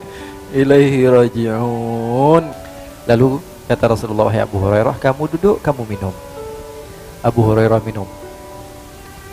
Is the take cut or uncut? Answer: cut